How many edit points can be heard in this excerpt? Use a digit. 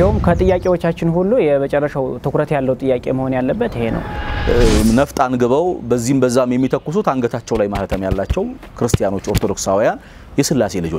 1